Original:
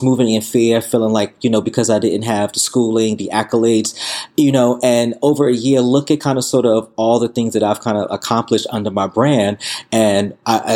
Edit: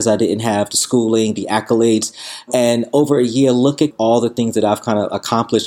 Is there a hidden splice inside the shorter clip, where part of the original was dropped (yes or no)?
yes